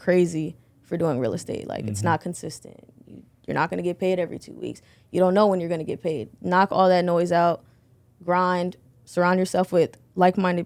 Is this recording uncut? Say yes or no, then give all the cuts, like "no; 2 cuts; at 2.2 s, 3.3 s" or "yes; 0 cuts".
yes; 0 cuts